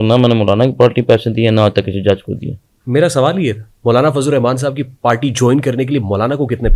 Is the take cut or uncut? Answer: uncut